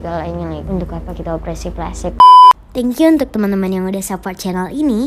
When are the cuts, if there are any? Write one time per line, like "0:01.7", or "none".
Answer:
0:02.1